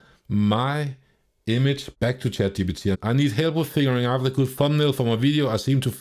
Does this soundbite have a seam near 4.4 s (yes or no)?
no